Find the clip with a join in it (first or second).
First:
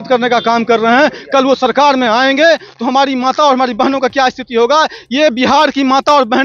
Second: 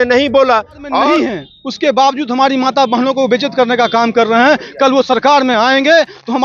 second